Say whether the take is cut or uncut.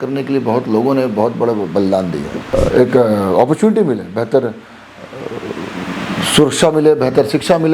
cut